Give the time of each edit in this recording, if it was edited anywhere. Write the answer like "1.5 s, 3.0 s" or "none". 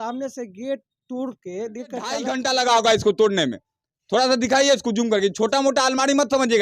2.2 s